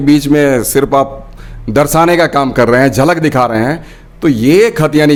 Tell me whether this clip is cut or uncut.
uncut